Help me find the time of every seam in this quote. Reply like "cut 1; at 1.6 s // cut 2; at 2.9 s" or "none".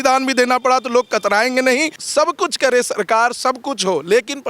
cut 1; at 2.0 s